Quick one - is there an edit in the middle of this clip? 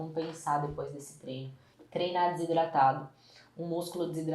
yes; 1 cut; at 1.8 s

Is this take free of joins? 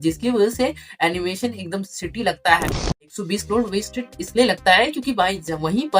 no; 1 cut; at 3.1 s

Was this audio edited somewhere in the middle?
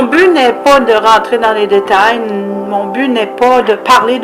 yes; 1 cut; at 1.2 s

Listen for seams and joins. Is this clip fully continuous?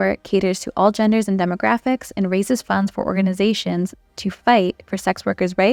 yes; 0 cuts

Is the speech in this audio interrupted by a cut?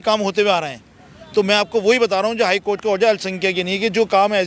no; 0 cuts

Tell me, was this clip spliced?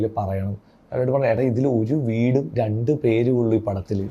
no; 0 cuts

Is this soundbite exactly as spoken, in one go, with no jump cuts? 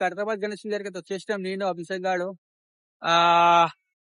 yes; 0 cuts

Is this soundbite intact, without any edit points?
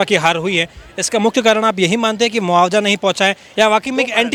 yes; 0 cuts

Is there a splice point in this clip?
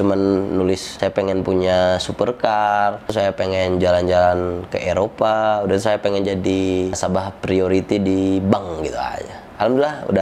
no; 0 cuts

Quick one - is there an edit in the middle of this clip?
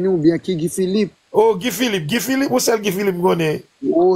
yes; 1 cut; at 1.1 s

